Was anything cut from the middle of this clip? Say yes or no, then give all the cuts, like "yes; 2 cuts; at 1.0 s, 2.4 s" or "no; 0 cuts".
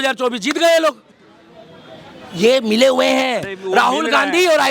no; 0 cuts